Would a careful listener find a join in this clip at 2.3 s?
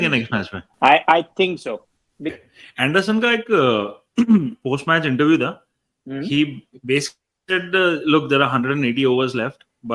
yes; 1 cut; at 2.3 s

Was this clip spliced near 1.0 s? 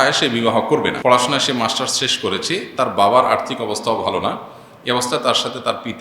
yes; 1 cut; at 1.0 s

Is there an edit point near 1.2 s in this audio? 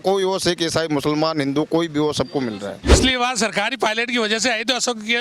no; 1 cut; at 2.9 s

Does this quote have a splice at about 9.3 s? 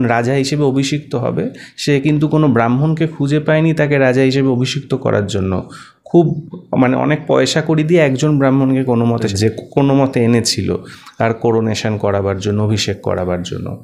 yes; 1 cut; at 9.3 s

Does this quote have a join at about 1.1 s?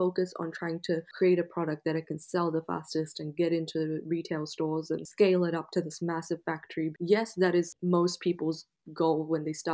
yes; 4 cuts; at 1.1 s, 5.1 s, 6.9 s, 7.8 s

